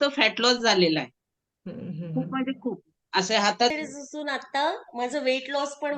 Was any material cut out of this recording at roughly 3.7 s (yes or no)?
yes